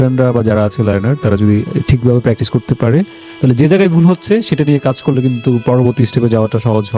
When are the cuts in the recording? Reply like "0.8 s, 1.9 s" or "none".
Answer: none